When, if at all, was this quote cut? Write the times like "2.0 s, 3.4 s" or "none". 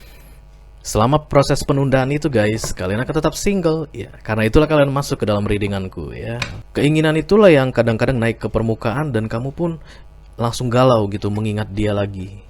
6.5 s